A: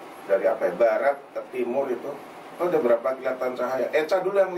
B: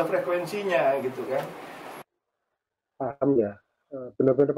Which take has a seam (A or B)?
B